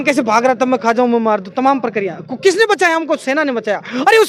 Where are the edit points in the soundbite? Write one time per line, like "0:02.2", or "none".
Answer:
none